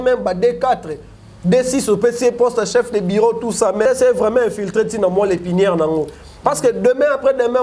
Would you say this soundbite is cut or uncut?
cut